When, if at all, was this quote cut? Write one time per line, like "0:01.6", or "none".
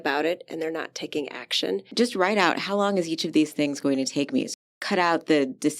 0:01.9
0:04.6